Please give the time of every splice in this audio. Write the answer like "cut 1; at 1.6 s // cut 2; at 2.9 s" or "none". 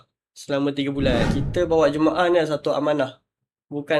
cut 1; at 1.3 s